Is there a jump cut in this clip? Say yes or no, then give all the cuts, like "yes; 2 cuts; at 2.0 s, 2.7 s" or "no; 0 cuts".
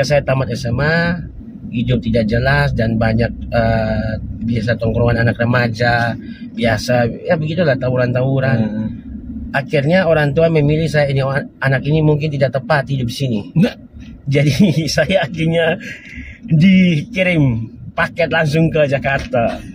no; 0 cuts